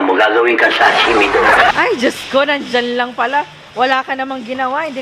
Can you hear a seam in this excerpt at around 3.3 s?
no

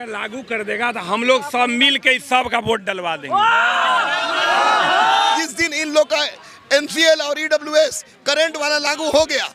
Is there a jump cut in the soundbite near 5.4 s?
yes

